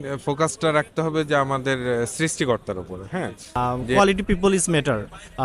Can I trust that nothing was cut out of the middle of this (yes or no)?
no